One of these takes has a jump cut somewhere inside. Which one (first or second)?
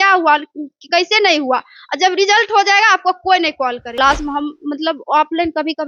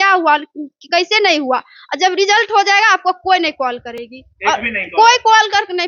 first